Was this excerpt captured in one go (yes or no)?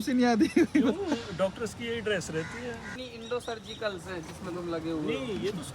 yes